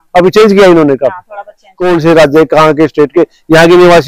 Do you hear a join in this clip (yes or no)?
yes